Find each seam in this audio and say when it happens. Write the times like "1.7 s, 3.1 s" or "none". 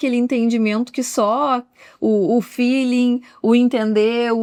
none